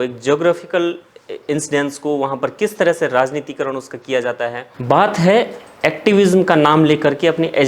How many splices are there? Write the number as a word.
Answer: one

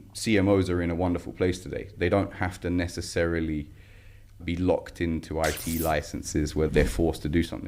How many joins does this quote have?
three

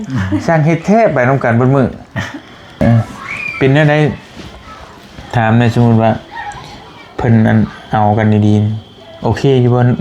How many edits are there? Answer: one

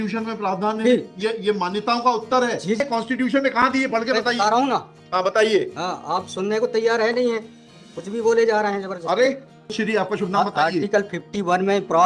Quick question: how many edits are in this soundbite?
two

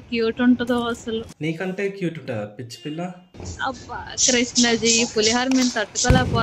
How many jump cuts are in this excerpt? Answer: zero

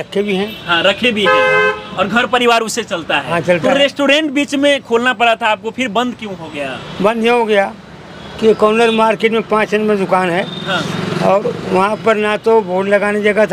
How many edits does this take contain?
zero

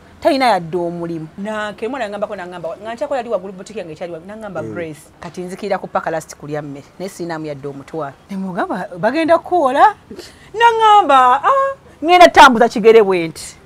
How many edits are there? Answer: three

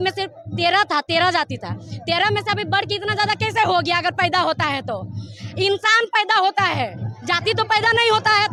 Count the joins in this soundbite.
zero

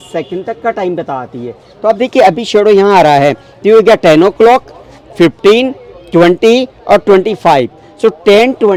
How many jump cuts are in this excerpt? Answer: zero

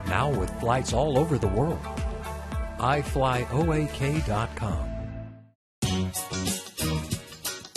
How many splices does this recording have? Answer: one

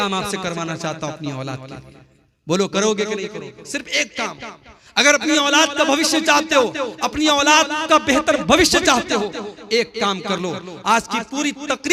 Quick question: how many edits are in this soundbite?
zero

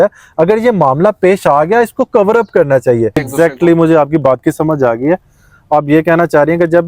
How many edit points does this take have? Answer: one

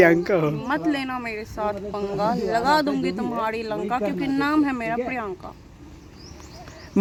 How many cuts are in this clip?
zero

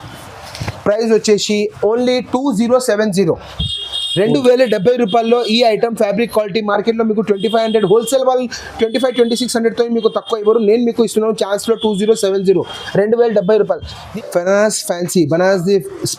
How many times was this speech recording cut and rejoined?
zero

